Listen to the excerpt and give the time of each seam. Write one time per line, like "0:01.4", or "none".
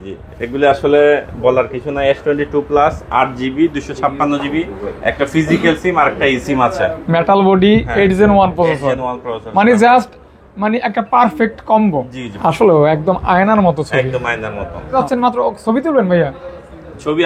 0:12.2
0:14.9